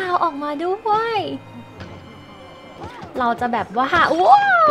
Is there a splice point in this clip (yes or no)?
yes